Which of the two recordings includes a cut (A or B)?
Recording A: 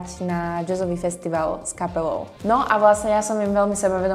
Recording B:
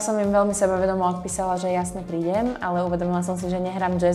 A